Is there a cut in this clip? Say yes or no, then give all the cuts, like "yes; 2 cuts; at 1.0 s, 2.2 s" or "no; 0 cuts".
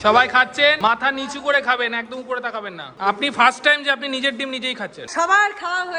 yes; 3 cuts; at 0.8 s, 2.8 s, 5.0 s